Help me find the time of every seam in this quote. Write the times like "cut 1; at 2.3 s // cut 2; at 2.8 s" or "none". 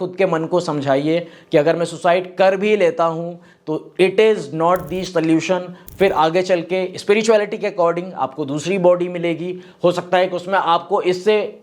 none